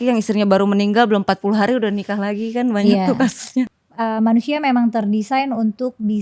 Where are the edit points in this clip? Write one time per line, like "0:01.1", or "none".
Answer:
0:03.7